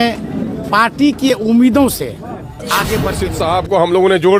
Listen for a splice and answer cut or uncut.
cut